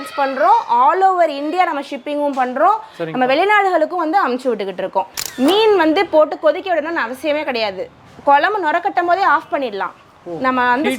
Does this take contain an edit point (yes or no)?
yes